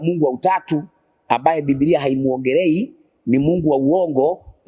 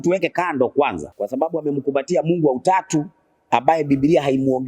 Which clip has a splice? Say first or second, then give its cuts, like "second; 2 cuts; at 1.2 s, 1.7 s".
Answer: second; 1 cut; at 1.1 s